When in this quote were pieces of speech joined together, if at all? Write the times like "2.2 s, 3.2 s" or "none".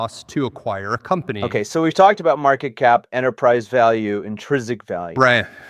1.4 s